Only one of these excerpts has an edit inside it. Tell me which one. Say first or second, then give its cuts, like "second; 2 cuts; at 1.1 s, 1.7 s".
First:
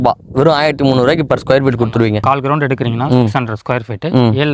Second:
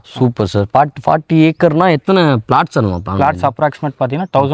first; 1 cut; at 2.2 s